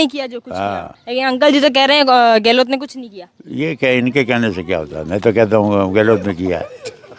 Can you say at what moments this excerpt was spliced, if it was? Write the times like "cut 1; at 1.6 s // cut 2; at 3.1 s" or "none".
cut 1; at 0.9 s